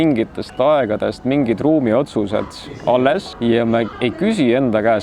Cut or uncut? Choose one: cut